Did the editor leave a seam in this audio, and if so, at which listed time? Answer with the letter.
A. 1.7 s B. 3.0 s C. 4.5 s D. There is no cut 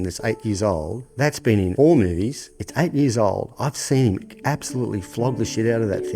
A